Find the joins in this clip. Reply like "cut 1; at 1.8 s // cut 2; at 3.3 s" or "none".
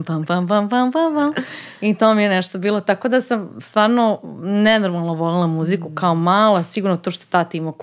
none

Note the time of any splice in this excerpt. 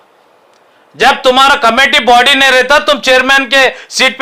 none

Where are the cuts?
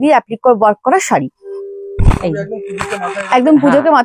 none

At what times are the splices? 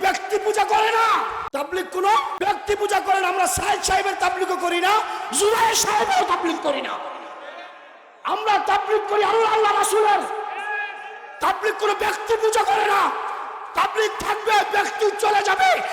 cut 1; at 1.4 s // cut 2; at 2.3 s

